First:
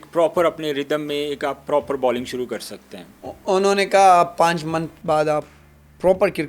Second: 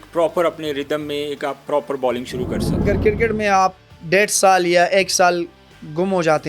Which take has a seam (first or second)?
second